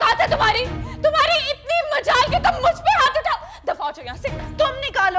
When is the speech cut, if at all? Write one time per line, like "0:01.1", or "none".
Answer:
none